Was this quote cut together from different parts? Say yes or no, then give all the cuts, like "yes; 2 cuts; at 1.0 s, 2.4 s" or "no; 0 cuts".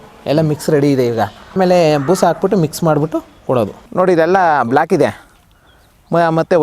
yes; 2 cuts; at 1.5 s, 3.8 s